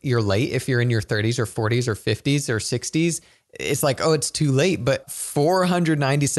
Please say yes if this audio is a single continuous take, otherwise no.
no